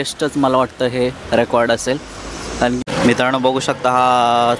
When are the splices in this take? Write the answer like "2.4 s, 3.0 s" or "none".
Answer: 2.8 s